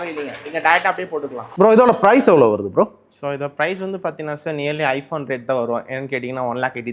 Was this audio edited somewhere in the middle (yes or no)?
yes